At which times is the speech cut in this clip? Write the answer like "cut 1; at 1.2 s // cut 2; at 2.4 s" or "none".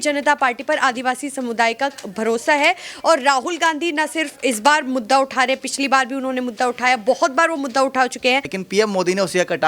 cut 1; at 8.5 s